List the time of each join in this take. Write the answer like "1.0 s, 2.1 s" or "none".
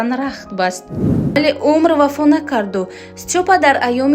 1.4 s